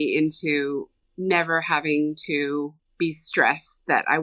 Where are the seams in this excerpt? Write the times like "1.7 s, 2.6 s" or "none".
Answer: 1.0 s, 2.8 s